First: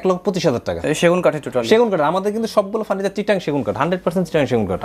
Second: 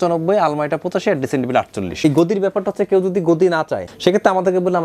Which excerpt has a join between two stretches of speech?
second; 2 cuts; at 2.0 s, 3.9 s

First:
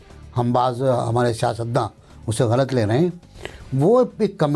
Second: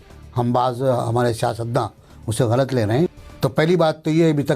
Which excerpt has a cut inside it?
second; 1 cut; at 3.2 s

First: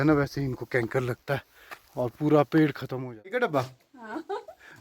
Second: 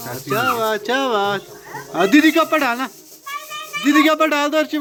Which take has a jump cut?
first; 1 cut; at 3.4 s

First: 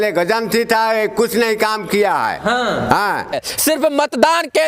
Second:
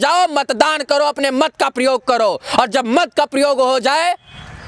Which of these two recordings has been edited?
first; 1 cut; at 3.4 s

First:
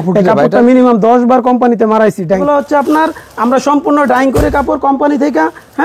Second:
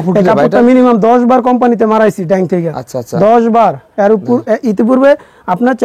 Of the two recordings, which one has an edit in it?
first; 1 cut; at 2.4 s

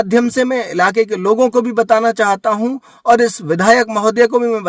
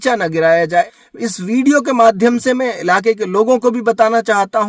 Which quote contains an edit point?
second; 1 cut; at 1.0 s

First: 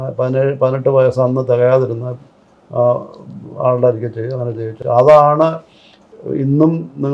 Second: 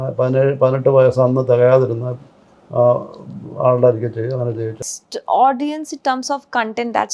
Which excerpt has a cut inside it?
second; 1 cut; at 4.8 s

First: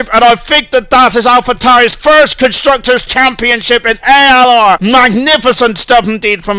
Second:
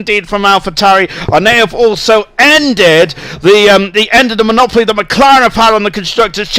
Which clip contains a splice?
first; 1 cut; at 4.8 s

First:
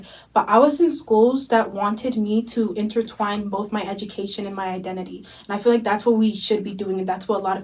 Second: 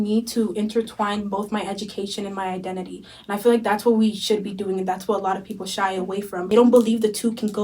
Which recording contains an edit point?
second; 1 cut; at 6.5 s

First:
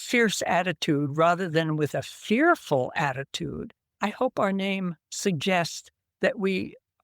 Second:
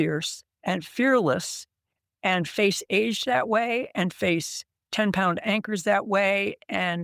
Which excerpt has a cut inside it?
first; 1 cut; at 3.9 s

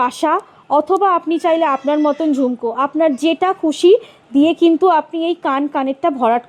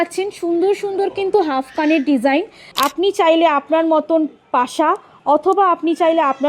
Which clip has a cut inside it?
second; 1 cut; at 2.6 s

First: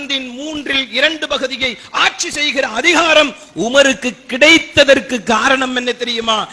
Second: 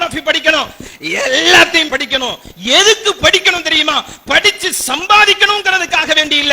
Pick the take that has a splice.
second; 1 cut; at 1.9 s

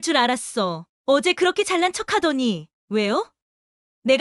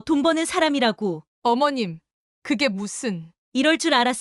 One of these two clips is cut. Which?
second; 1 cut; at 1.3 s

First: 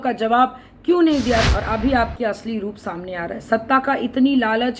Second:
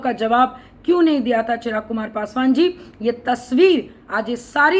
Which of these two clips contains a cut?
first; 1 cut; at 1.5 s

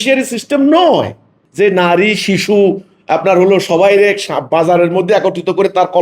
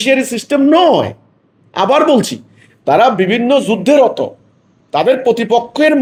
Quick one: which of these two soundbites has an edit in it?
first; 1 cut; at 1.4 s

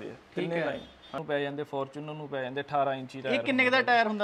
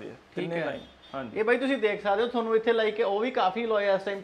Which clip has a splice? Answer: first; 1 cut; at 1.2 s

